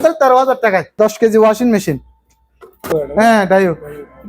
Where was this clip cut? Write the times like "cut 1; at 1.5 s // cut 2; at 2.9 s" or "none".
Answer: cut 1; at 0.9 s // cut 2; at 2.9 s